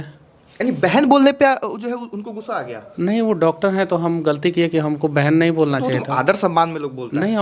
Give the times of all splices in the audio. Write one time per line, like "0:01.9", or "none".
none